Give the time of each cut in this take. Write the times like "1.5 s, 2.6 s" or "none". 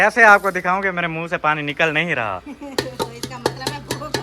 none